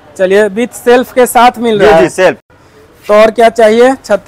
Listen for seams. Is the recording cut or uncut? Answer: uncut